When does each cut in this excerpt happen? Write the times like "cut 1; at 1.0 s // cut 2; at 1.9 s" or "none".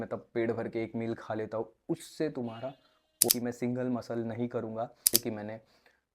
cut 1; at 3.3 s // cut 2; at 5.0 s